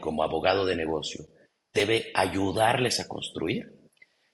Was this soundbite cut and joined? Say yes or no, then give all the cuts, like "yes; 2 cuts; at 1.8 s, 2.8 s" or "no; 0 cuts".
yes; 1 cut; at 1.8 s